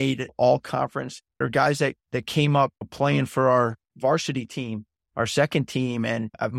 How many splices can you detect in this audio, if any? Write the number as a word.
one